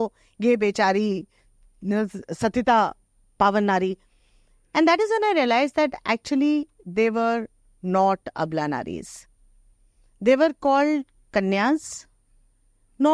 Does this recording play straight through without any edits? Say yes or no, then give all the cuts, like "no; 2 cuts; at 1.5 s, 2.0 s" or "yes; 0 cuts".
yes; 0 cuts